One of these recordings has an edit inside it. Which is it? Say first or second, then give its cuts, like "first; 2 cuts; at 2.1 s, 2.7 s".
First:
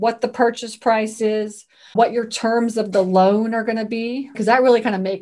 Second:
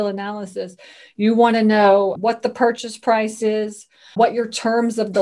first; 1 cut; at 4.3 s